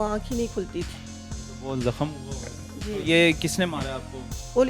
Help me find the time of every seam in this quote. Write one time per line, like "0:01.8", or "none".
none